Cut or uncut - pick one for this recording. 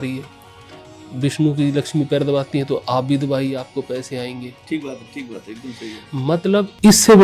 uncut